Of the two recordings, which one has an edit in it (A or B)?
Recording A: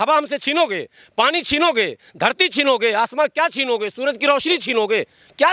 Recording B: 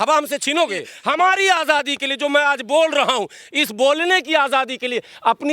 B